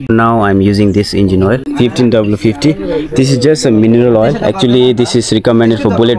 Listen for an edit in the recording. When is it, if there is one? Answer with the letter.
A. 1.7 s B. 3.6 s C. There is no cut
A